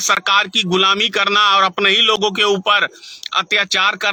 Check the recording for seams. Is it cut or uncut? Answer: uncut